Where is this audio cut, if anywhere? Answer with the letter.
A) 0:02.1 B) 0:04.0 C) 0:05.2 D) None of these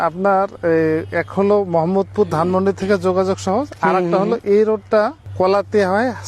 C